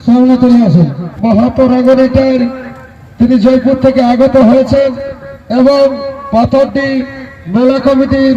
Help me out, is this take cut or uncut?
cut